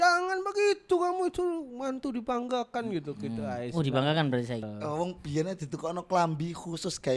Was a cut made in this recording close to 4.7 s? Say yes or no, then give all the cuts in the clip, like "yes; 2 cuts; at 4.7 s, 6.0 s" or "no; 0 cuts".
yes; 1 cut; at 4.7 s